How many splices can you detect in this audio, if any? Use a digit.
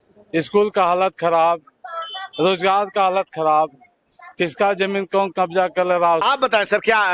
1